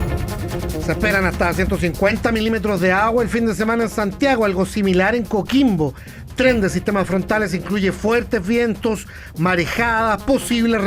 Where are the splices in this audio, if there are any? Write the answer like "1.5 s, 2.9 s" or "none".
0.9 s